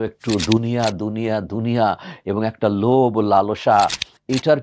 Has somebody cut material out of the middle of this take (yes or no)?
no